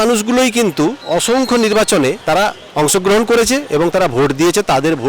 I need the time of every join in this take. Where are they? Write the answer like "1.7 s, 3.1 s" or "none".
1.0 s, 2.2 s